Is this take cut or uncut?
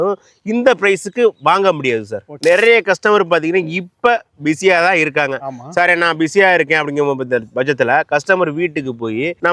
cut